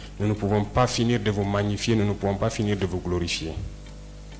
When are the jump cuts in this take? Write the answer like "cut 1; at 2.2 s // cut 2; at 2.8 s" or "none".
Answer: none